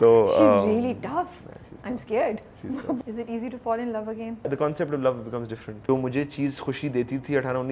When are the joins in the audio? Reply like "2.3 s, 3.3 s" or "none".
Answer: 3.0 s, 4.4 s, 5.8 s